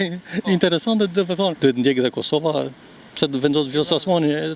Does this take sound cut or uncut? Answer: cut